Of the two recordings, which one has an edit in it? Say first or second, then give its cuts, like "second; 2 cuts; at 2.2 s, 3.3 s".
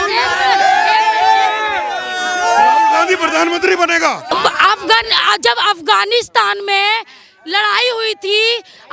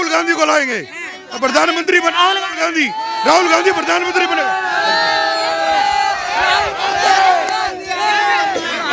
first; 1 cut; at 4.2 s